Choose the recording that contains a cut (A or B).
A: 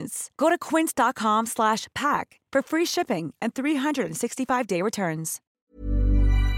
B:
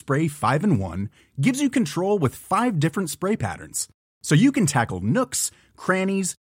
A